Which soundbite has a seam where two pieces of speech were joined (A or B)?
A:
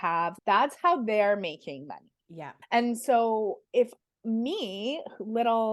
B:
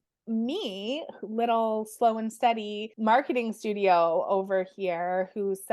B